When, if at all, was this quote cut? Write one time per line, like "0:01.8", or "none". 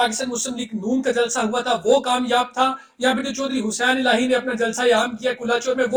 none